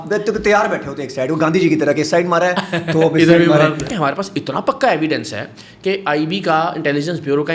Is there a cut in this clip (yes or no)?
yes